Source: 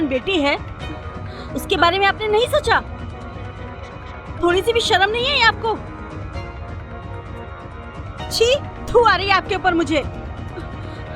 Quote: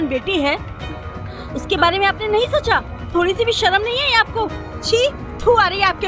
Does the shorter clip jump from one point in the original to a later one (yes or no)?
yes